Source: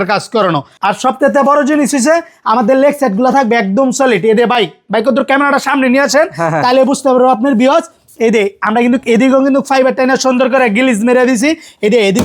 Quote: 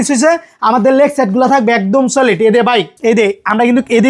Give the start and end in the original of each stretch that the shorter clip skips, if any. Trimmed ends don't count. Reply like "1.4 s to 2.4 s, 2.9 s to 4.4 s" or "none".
4.5 s to 7.9 s